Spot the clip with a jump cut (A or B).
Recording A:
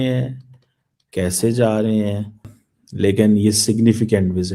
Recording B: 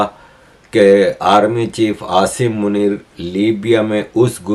A